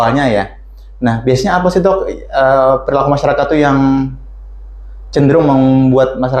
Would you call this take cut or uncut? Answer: uncut